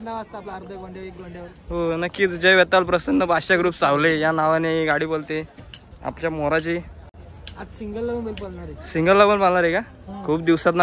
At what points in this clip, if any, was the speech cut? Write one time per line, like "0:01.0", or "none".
none

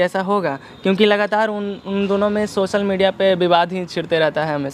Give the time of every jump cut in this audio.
none

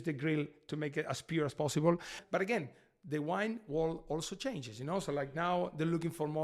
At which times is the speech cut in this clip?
0:02.2

